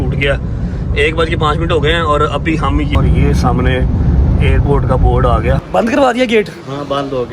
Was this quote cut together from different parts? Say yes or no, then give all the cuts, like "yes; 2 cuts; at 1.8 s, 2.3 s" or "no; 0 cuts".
yes; 2 cuts; at 3.0 s, 5.7 s